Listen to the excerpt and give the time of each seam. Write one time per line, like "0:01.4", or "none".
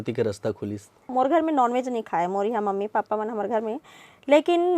0:01.1